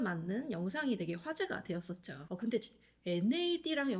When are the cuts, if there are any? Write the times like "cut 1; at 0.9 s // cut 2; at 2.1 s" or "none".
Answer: cut 1; at 2.1 s